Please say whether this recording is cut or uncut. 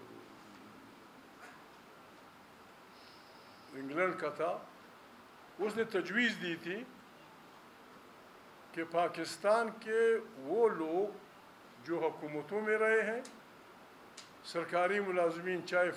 uncut